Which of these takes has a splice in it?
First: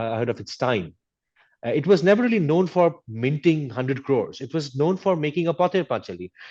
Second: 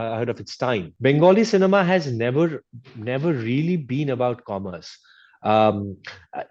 second; 1 cut; at 0.9 s

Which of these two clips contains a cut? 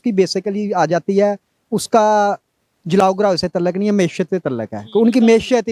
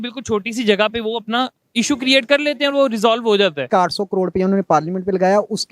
second; 1 cut; at 3.7 s

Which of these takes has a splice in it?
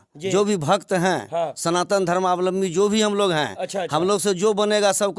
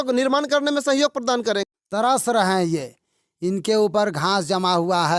second; 1 cut; at 1.6 s

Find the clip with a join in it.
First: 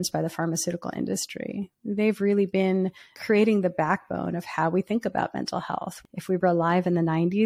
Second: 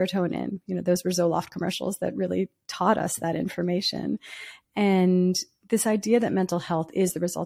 first; 2 cuts; at 3.1 s, 5.9 s

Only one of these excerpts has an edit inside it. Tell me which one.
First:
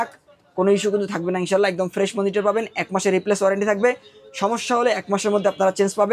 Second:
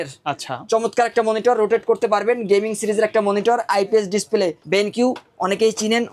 second; 1 cut; at 4.6 s

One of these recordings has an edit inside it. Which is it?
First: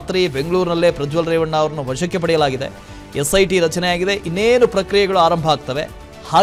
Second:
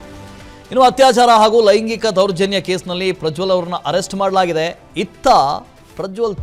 second; 1 cut; at 4.7 s

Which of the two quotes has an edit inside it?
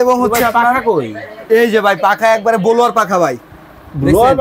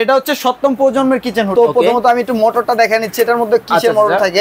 second; 1 cut; at 1.5 s

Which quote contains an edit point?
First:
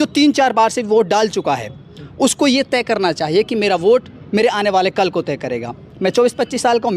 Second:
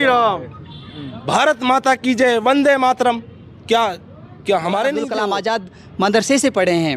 second; 1 cut; at 5.2 s

